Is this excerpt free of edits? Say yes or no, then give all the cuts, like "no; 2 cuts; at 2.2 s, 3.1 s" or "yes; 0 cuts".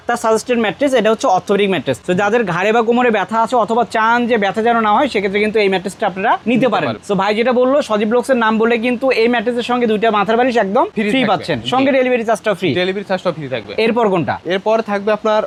yes; 0 cuts